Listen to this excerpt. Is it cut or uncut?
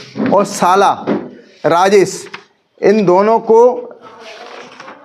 uncut